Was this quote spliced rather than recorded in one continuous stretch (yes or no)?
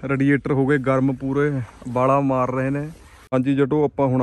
yes